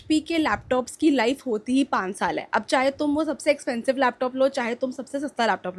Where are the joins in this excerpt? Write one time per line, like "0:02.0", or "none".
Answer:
none